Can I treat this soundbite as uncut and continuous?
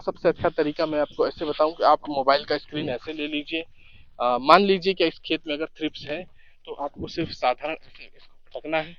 yes; 0 cuts

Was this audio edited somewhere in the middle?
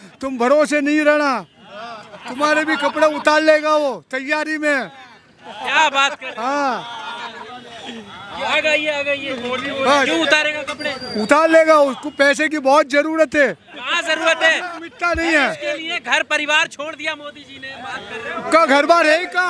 no; 0 cuts

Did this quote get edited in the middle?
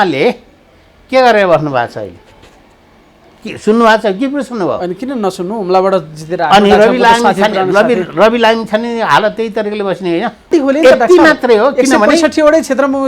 yes; 1 cut; at 10.5 s

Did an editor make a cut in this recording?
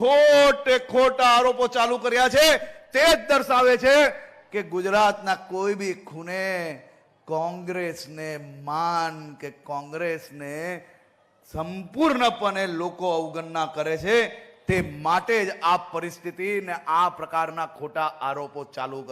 no; 0 cuts

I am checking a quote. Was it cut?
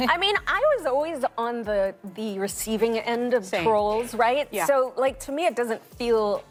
no; 0 cuts

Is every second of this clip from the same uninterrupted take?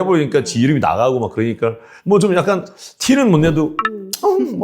no; 1 cut; at 1.9 s

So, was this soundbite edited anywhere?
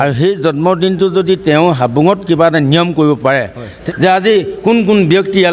yes; 1 cut; at 3.8 s

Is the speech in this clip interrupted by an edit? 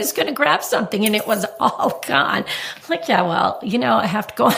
no; 0 cuts

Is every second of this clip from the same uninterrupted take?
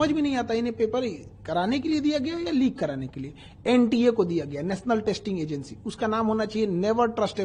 yes; 0 cuts

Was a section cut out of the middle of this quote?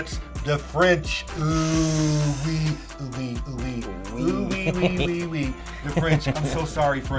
no; 0 cuts

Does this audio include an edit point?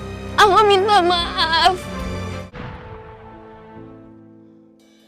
yes; 1 cut; at 2.5 s

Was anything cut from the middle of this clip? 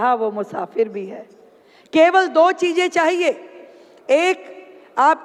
no; 0 cuts

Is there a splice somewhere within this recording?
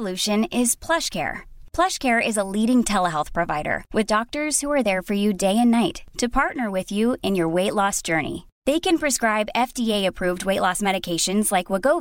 no; 0 cuts

